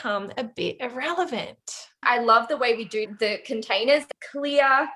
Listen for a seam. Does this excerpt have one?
yes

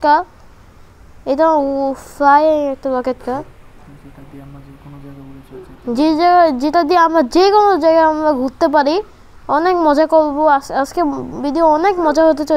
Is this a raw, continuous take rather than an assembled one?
yes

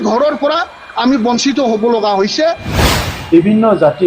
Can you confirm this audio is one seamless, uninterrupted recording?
no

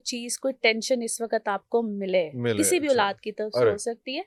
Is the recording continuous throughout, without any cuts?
yes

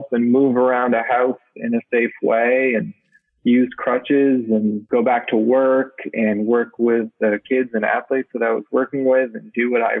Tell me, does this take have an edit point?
no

